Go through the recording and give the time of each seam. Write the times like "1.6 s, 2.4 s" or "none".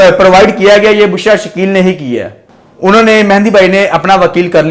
2.4 s